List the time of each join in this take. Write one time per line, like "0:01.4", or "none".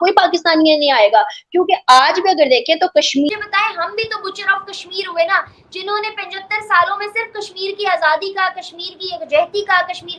0:03.3